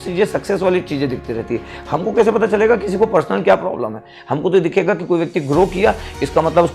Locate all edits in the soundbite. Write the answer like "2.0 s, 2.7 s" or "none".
none